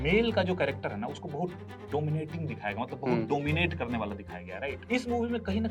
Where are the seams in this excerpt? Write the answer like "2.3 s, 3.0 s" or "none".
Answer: 1.7 s, 4.8 s